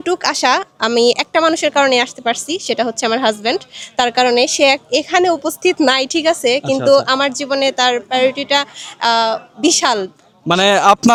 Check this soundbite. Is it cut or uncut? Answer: uncut